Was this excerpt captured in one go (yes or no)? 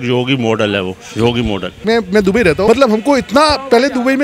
no